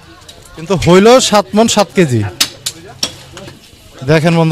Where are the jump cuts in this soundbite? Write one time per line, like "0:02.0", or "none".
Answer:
0:03.5

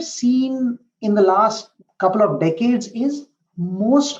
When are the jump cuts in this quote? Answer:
0:01.7

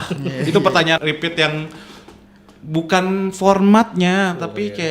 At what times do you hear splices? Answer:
0:01.0

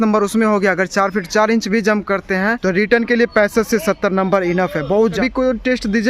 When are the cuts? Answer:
0:02.6
0:05.2

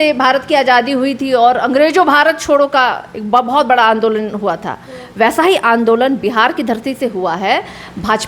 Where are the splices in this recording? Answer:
none

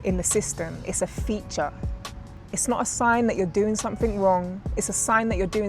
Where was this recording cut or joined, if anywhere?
none

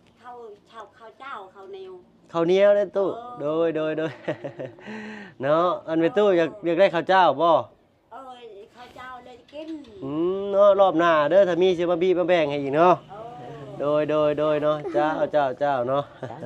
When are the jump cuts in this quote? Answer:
none

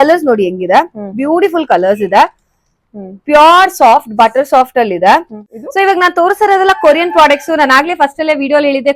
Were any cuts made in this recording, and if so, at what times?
0:05.3

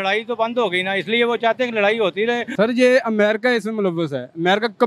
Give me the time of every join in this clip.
0:02.5

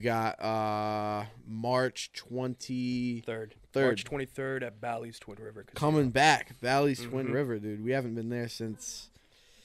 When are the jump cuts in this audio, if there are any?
none

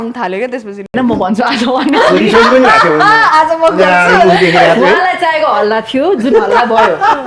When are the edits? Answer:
0:00.9

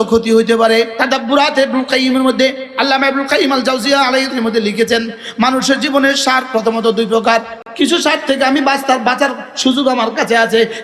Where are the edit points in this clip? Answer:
0:00.9
0:04.3
0:07.6

